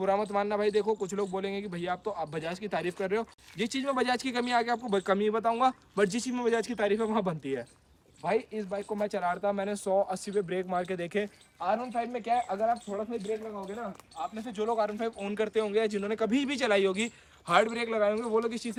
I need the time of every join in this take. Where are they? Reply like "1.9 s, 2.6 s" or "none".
none